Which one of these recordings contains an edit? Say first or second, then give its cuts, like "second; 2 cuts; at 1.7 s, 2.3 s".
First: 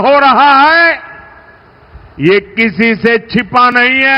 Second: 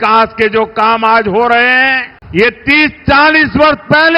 second; 1 cut; at 2.1 s